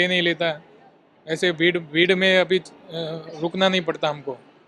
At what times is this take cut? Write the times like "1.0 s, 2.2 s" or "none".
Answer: none